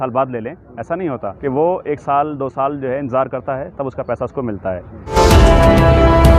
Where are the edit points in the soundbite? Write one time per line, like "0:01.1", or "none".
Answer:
0:01.3
0:05.0